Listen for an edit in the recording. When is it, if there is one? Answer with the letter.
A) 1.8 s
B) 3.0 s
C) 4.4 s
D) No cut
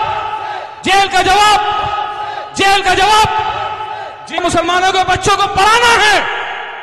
C